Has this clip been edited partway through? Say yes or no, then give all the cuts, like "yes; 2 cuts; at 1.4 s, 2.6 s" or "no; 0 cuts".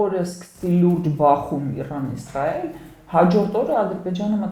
no; 0 cuts